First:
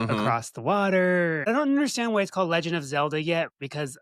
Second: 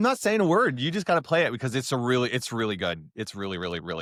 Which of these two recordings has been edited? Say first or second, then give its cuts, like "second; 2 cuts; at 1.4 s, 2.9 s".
first; 1 cut; at 1.5 s